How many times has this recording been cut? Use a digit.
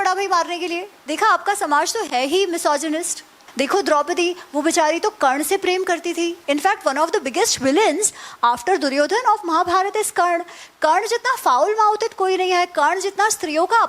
3